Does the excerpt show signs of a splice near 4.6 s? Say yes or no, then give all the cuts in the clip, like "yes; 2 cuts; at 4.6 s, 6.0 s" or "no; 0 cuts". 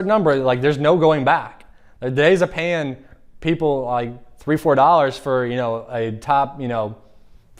no; 0 cuts